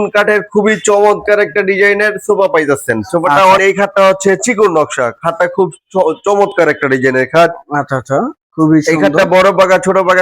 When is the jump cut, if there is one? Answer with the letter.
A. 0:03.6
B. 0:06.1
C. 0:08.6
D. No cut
A